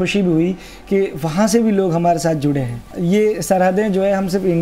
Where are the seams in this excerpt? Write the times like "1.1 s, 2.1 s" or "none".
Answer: 2.9 s